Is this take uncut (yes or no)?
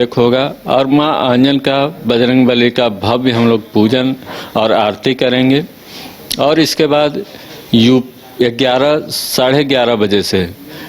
yes